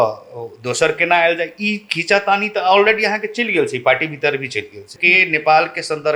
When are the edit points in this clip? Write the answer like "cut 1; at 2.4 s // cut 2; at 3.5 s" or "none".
cut 1; at 4.9 s